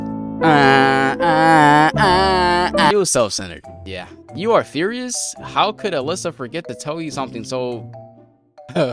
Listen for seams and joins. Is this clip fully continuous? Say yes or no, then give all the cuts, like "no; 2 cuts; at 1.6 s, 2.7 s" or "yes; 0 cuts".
no; 1 cut; at 2.9 s